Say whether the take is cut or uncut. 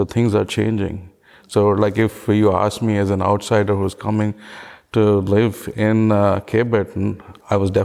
uncut